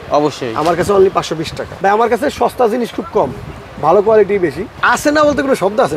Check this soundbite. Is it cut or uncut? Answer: cut